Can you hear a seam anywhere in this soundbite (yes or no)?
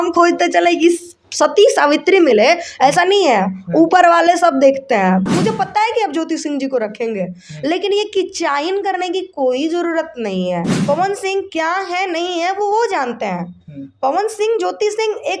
yes